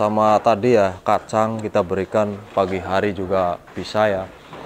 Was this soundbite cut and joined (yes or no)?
no